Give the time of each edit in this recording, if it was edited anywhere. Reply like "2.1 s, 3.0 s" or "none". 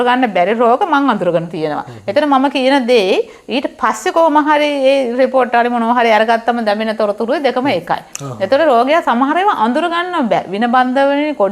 none